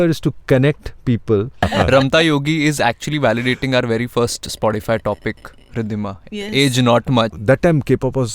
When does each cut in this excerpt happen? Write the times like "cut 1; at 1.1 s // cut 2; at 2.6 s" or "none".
cut 1; at 1.7 s // cut 2; at 7.4 s